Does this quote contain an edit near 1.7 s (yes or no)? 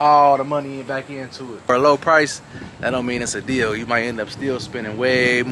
yes